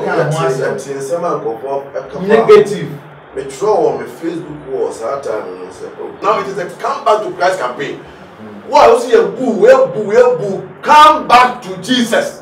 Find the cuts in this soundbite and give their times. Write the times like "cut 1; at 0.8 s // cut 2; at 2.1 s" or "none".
cut 1; at 6.2 s